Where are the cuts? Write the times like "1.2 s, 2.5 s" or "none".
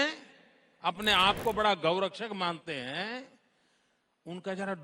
none